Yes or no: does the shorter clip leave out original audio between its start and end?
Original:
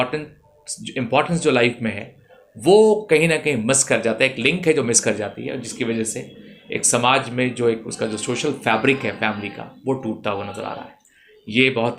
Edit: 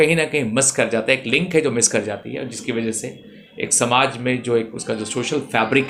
no